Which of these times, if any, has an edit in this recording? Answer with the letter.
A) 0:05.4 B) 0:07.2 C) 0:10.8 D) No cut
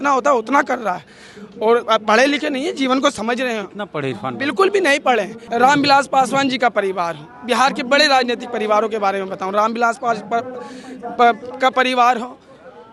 A